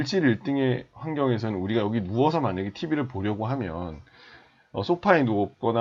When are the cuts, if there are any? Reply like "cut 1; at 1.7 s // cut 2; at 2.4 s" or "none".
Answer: none